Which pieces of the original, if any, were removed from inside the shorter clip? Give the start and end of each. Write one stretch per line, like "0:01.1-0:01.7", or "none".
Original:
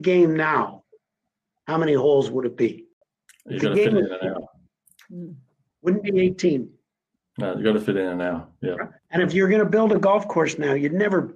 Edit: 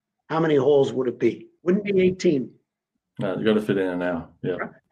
0:02.9-0:05.7